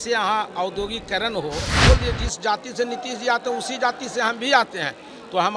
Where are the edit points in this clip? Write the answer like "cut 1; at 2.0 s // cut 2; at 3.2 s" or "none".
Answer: cut 1; at 1.8 s

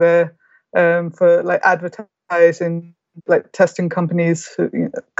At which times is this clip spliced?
cut 1; at 3.1 s

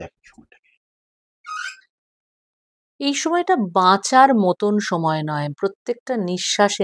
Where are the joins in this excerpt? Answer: none

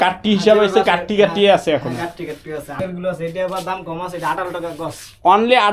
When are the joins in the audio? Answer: cut 1; at 2.8 s

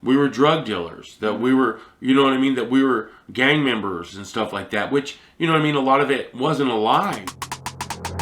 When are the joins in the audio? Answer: cut 1; at 7.3 s

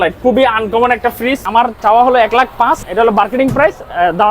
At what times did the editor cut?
cut 1; at 1.8 s // cut 2; at 2.9 s

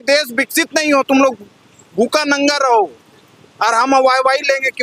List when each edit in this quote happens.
none

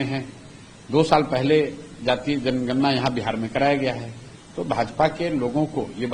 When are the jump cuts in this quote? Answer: none

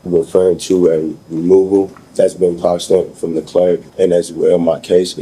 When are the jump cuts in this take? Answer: cut 1; at 2.0 s // cut 2; at 3.9 s

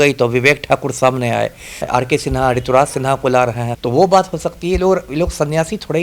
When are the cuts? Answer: cut 1; at 1.8 s // cut 2; at 3.7 s

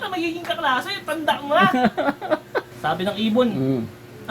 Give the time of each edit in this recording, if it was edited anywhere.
cut 1; at 2.7 s

